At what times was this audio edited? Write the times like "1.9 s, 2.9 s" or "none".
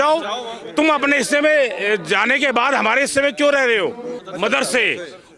4.1 s